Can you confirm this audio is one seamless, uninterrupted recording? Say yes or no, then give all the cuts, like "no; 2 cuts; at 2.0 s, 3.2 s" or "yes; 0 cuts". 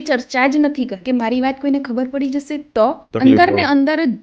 no; 2 cuts; at 1.0 s, 3.0 s